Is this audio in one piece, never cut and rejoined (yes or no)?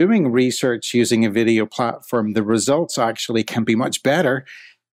yes